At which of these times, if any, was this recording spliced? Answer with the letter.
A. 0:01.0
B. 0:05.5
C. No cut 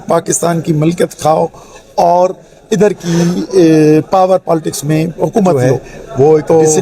B